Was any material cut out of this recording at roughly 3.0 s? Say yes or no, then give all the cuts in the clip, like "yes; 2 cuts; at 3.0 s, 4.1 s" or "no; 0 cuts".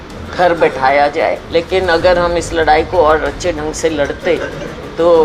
no; 1 cut; at 1.4 s